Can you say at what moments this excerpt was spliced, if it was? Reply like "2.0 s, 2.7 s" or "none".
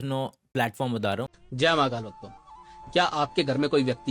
1.3 s